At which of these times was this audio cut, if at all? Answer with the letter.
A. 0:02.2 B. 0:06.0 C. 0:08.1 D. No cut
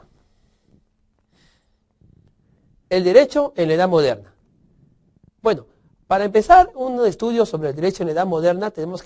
B